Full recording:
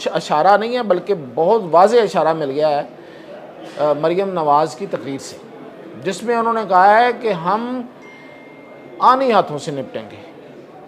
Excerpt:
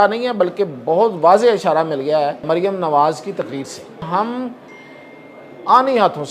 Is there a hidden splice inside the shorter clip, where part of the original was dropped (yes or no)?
yes